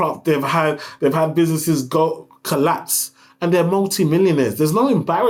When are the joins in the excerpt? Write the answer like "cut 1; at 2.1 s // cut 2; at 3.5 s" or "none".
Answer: none

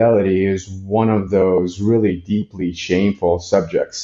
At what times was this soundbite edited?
none

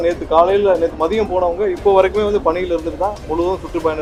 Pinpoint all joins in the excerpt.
none

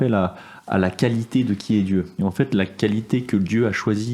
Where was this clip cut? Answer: cut 1; at 2.1 s

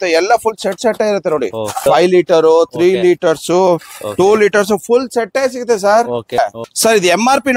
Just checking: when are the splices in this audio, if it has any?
cut 1; at 1.9 s // cut 2; at 6.4 s

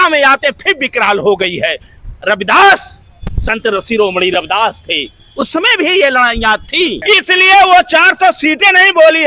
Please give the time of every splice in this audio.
cut 1; at 7.0 s

